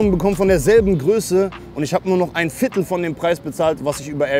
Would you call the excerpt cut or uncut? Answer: uncut